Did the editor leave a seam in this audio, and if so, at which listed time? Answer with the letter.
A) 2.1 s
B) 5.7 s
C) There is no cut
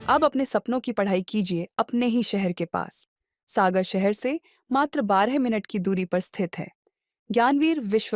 C